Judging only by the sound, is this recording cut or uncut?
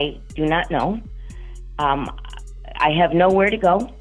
uncut